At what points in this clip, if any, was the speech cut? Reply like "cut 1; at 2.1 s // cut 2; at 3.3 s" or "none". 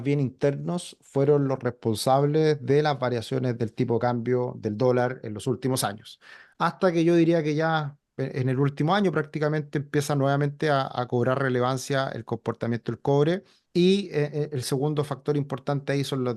cut 1; at 13.6 s